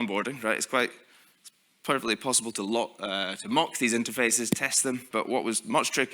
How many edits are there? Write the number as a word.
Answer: one